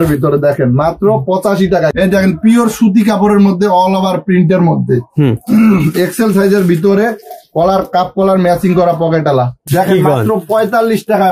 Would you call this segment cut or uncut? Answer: cut